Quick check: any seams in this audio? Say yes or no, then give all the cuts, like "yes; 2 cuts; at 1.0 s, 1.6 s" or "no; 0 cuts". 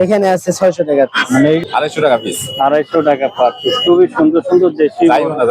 yes; 1 cut; at 1.6 s